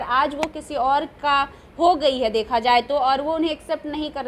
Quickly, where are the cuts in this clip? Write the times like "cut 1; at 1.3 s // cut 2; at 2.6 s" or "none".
none